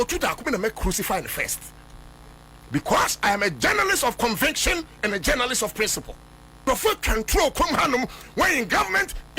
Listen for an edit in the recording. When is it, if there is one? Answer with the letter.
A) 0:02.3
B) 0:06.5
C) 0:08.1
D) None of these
B